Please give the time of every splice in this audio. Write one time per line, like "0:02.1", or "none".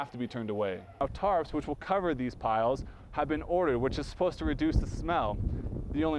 0:01.0